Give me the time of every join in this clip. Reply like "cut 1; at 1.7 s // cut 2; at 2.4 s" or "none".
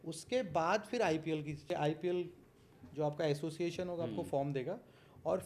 cut 1; at 1.6 s